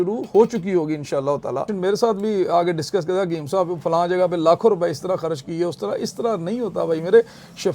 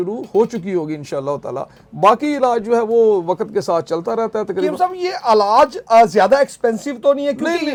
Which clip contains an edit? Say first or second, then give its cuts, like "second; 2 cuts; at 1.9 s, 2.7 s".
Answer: first; 1 cut; at 1.7 s